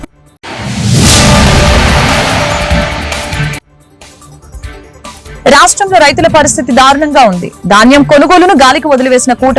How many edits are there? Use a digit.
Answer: 0